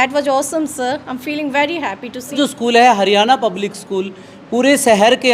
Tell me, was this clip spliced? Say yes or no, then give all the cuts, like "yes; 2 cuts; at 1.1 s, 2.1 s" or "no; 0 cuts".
yes; 1 cut; at 2.4 s